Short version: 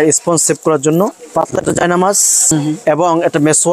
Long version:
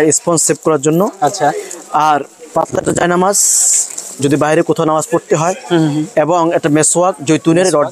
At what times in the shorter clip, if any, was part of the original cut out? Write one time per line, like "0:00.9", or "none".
0:01.1
0:02.5